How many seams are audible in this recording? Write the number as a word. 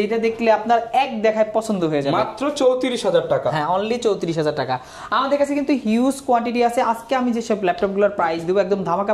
zero